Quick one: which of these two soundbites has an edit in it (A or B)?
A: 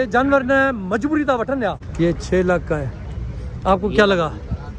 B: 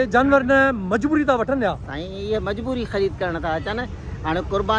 A